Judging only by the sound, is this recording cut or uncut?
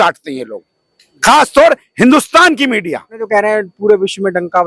cut